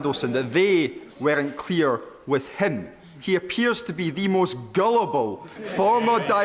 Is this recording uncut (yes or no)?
yes